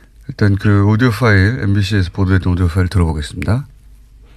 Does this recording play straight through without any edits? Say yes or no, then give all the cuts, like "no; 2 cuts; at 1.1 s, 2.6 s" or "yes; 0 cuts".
yes; 0 cuts